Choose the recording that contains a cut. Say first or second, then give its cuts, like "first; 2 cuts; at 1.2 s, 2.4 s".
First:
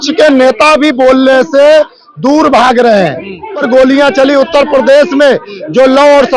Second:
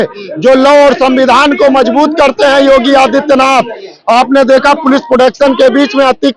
first; 1 cut; at 3.6 s